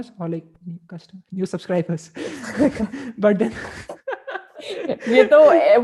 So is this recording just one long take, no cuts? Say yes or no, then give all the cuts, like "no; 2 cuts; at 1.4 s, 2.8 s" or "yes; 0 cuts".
yes; 0 cuts